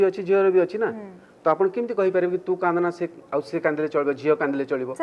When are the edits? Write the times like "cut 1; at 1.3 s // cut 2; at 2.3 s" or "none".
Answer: none